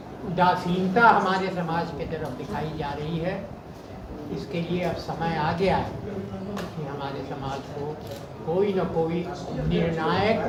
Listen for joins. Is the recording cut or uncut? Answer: uncut